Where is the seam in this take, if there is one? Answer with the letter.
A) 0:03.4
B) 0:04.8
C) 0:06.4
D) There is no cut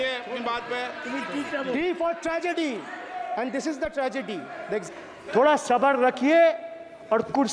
B